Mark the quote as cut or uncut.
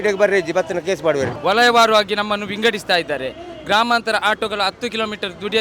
cut